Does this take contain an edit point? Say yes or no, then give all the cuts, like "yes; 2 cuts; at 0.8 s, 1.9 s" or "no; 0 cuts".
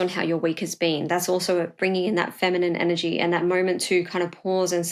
no; 0 cuts